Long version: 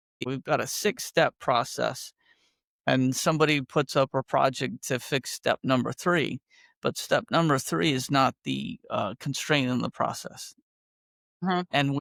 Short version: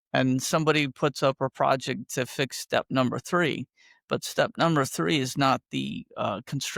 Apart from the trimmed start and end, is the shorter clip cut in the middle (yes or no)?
no